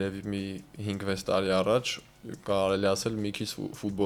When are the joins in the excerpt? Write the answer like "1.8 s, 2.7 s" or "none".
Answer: none